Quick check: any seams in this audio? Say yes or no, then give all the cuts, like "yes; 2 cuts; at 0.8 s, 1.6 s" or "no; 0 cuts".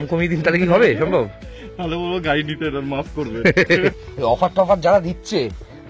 yes; 1 cut; at 3.9 s